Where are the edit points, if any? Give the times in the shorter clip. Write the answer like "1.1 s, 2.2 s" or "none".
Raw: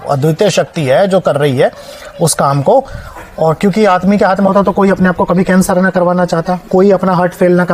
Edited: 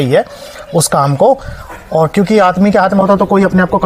none